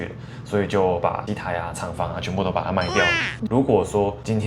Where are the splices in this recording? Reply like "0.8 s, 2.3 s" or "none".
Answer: 3.3 s

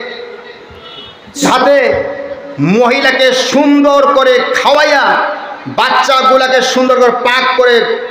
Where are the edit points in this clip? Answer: 1.4 s

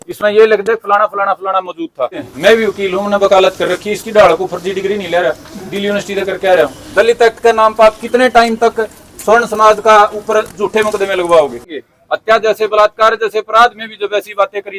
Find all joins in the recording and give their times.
2.3 s, 6.8 s, 11.8 s

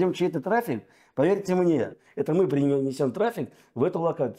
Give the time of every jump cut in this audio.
2.0 s

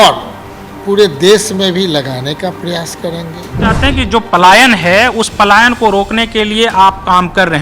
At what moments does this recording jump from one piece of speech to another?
3.7 s

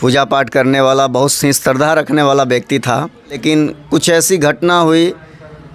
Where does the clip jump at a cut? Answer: 3.4 s

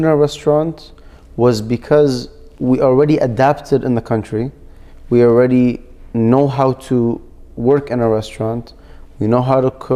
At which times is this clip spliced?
none

